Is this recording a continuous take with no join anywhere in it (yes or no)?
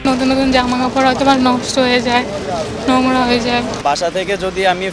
no